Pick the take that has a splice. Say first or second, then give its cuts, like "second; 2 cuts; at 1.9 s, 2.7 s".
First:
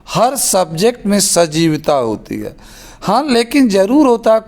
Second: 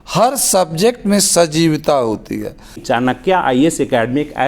second; 1 cut; at 2.8 s